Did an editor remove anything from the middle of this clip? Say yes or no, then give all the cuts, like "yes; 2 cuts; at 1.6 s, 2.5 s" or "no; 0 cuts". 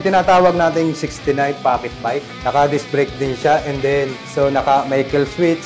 yes; 2 cuts; at 2.3 s, 4.2 s